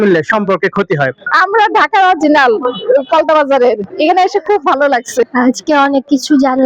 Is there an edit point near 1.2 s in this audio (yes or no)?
yes